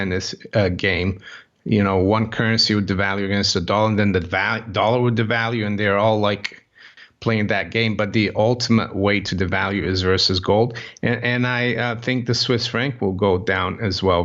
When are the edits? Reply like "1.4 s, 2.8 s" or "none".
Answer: none